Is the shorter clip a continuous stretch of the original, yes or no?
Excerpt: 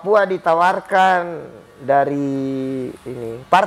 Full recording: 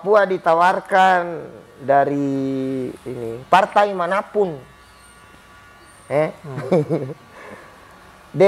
yes